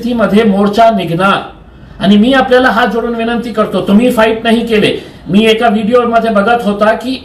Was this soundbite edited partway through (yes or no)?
no